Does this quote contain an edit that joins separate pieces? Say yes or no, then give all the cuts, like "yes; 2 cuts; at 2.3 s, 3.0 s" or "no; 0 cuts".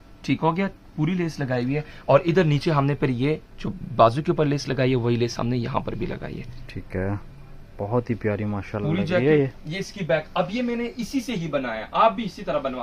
no; 0 cuts